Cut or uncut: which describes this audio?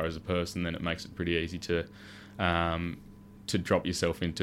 uncut